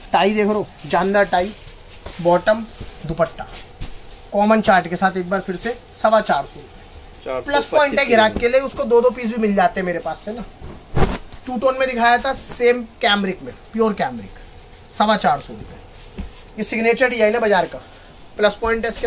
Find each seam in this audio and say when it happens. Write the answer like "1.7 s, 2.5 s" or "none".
none